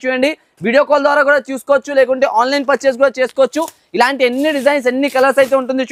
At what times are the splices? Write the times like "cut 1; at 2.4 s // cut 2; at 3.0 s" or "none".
none